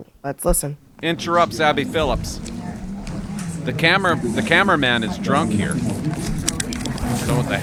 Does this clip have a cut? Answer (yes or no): no